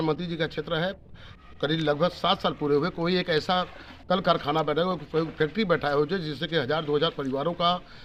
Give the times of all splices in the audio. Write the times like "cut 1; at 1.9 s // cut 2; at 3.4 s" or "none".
none